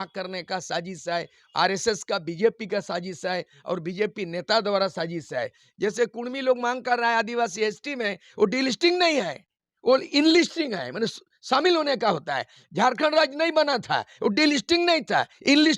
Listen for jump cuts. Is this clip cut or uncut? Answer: cut